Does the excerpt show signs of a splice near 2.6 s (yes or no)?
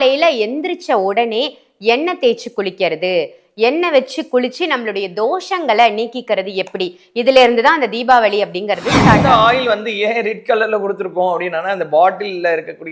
no